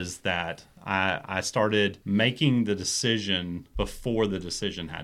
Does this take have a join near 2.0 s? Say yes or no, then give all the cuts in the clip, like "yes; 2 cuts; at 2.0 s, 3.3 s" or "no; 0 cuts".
yes; 2 cuts; at 2.0 s, 3.6 s